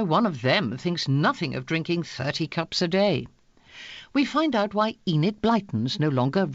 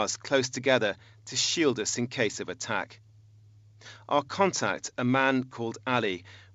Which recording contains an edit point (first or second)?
second